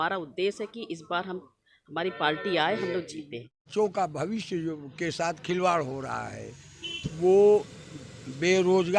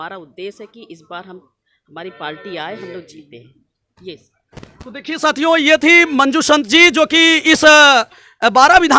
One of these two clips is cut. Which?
first; 1 cut; at 3.7 s

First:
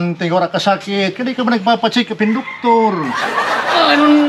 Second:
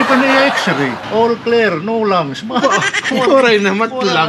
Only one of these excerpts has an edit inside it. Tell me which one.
second; 1 cut; at 1.1 s

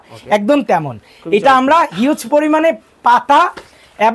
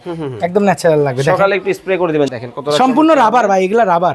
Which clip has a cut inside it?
second; 1 cut; at 2.3 s

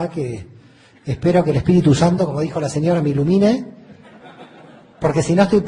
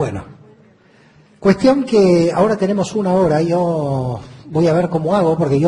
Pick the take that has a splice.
first; 1 cut; at 4.8 s

